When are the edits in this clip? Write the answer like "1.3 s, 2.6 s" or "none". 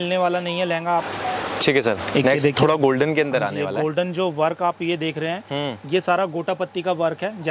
1.3 s